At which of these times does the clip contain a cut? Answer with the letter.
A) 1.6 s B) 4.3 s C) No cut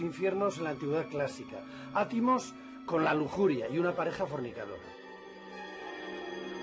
B